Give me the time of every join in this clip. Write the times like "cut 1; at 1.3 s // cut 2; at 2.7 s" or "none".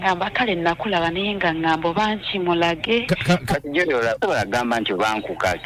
cut 1; at 3.4 s